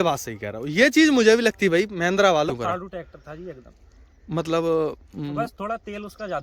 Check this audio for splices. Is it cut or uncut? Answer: cut